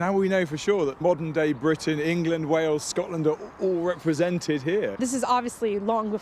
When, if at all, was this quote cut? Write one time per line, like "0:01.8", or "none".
0:01.0
0:05.0